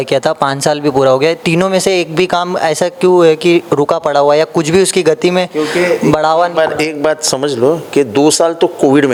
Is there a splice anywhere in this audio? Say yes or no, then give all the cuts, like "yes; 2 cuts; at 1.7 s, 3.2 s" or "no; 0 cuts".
no; 0 cuts